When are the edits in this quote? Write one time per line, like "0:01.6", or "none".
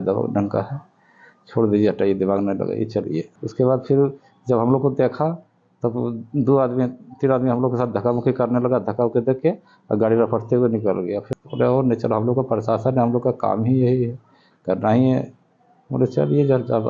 0:03.4
0:11.3